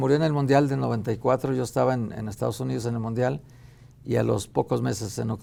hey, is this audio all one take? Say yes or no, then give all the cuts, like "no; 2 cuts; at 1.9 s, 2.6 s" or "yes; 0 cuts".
yes; 0 cuts